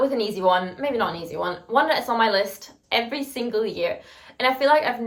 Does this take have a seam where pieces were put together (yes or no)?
no